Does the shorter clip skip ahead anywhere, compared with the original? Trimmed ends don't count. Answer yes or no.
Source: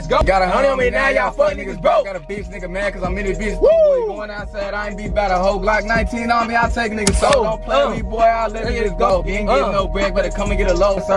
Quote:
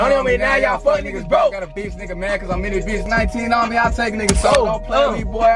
yes